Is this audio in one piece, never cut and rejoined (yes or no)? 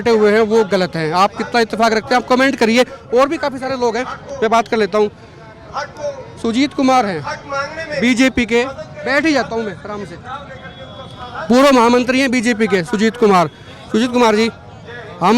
yes